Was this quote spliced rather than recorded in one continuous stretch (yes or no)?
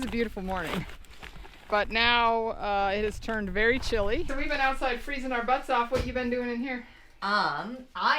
yes